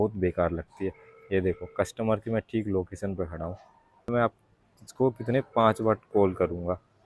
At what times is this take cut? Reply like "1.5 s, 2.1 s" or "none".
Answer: none